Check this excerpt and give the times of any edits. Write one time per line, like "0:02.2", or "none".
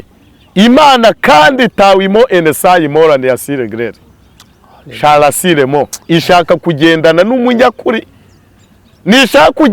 none